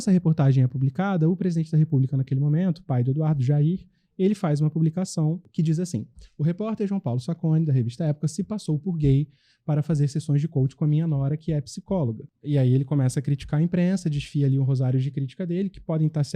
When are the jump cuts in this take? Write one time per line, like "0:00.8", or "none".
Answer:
0:05.5
0:12.3